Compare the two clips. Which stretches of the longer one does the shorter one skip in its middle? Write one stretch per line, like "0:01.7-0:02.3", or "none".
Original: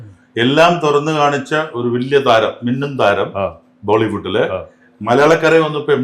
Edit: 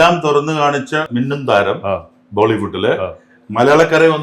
0:01.7-0:02.6